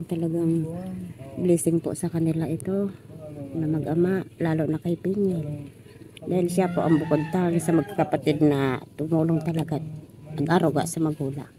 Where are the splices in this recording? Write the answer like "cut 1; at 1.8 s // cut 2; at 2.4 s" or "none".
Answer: none